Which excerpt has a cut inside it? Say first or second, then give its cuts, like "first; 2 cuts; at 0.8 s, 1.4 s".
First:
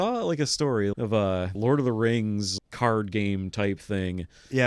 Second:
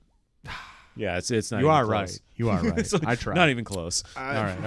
first; 2 cuts; at 1.5 s, 2.5 s